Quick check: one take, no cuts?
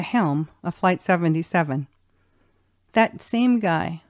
no; 1 cut; at 2.9 s

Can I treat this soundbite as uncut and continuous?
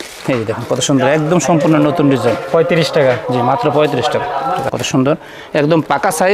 no; 1 cut; at 4.7 s

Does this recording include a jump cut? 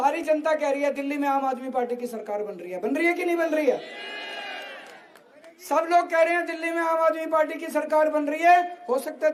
no; 0 cuts

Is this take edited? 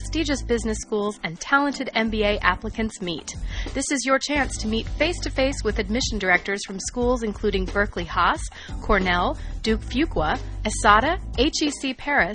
no; 0 cuts

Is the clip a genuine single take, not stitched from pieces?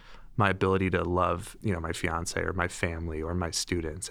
no; 1 cut; at 1.5 s

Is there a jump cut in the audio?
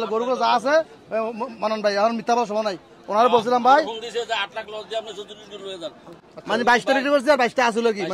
no; 0 cuts

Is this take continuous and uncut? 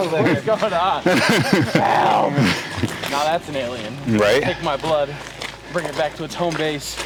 yes; 0 cuts

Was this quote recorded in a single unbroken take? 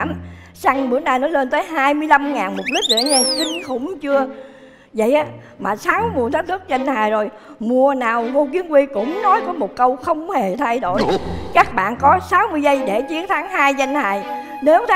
yes; 0 cuts

